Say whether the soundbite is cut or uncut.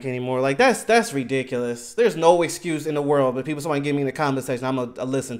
uncut